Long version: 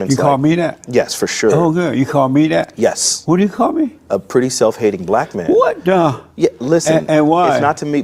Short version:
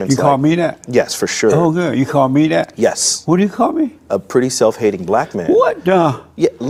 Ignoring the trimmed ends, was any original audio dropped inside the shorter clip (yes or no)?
no